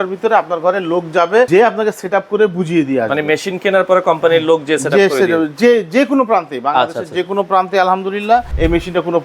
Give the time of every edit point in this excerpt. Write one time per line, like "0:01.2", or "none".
0:01.5
0:08.5